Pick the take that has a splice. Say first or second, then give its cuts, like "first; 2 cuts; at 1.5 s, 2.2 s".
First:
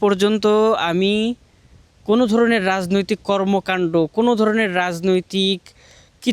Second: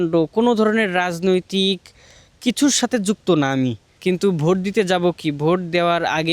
second; 1 cut; at 3.9 s